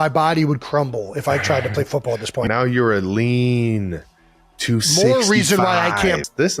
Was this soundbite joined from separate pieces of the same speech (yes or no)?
yes